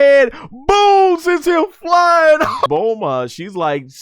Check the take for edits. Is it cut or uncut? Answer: cut